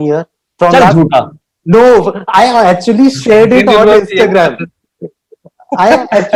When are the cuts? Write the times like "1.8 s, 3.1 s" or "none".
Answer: none